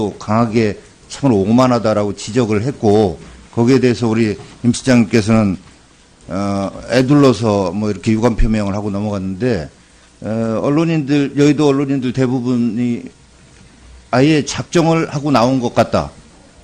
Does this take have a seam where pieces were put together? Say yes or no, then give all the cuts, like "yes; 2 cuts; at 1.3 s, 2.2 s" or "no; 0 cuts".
no; 0 cuts